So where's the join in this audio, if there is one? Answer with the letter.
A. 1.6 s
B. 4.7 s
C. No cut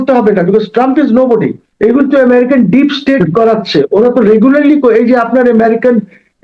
A